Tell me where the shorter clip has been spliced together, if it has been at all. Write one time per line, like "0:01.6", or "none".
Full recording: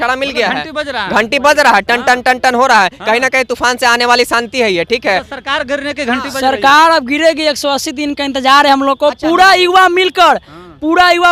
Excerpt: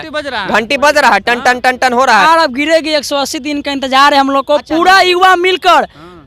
0:02.2